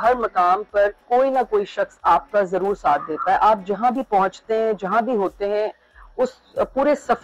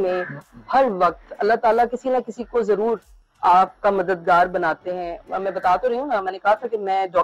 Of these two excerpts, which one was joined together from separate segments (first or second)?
second